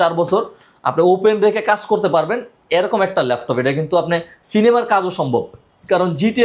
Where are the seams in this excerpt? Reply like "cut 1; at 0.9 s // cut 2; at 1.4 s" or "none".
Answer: none